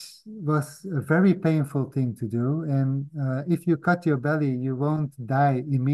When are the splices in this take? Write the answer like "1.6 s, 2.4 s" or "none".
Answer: none